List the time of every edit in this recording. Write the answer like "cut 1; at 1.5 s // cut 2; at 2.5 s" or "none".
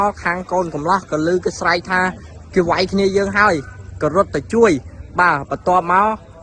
none